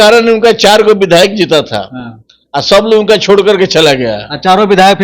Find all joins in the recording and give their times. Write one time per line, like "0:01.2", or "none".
none